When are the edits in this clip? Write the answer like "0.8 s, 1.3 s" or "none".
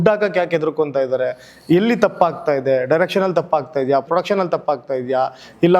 none